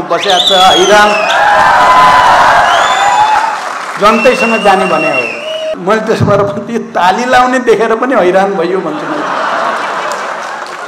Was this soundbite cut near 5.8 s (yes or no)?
yes